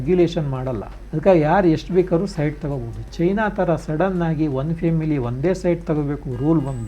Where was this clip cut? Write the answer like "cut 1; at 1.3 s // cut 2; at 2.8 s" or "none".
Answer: cut 1; at 1.0 s